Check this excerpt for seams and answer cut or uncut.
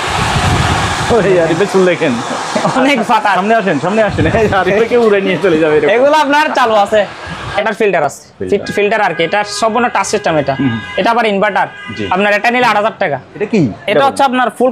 cut